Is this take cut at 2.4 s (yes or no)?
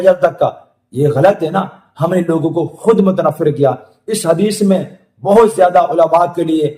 no